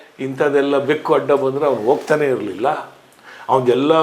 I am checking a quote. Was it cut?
no; 0 cuts

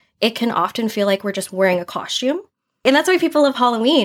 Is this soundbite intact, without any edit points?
no; 1 cut; at 2.8 s

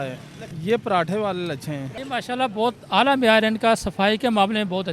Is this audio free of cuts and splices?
no; 1 cut; at 1.9 s

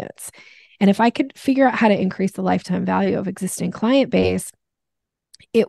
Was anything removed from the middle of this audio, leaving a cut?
no; 0 cuts

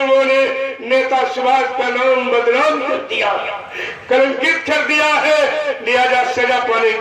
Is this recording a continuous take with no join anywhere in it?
yes; 0 cuts

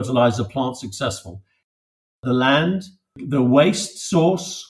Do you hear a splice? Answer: yes; 2 cuts; at 2.0 s, 3.2 s

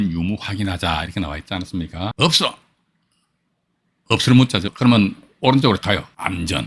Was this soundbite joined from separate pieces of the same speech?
yes; 3 cuts; at 2.1 s, 4.7 s, 5.8 s

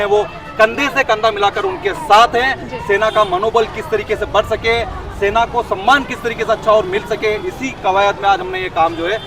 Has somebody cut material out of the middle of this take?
no; 0 cuts

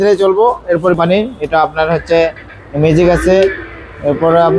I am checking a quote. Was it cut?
yes; 1 cut; at 1.0 s

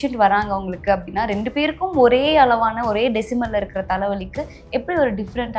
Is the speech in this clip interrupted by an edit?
no; 0 cuts

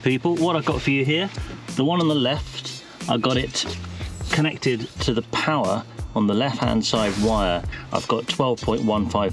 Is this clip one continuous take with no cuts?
yes; 0 cuts

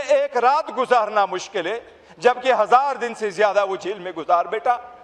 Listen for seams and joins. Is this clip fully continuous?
yes; 0 cuts

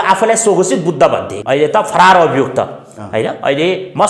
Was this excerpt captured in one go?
no; 1 cut; at 1.3 s

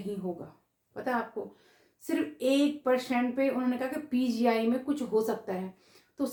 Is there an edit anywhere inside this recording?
no; 0 cuts

